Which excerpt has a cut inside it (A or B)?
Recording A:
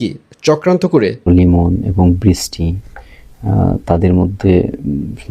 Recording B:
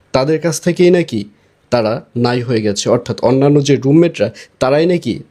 A